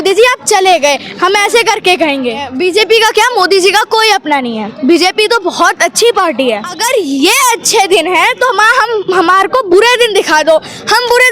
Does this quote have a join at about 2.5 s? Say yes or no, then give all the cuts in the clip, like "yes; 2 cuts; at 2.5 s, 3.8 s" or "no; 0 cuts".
yes; 2 cuts; at 2.5 s, 6.7 s